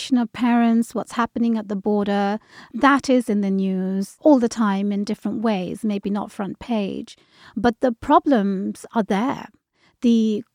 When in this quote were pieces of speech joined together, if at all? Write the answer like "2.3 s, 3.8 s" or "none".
2.6 s, 4.1 s